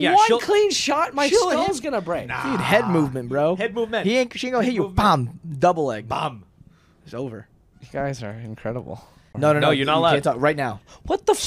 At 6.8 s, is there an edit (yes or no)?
no